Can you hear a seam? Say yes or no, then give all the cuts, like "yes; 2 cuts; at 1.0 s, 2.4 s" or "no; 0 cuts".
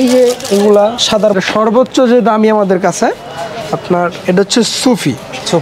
yes; 1 cut; at 1.3 s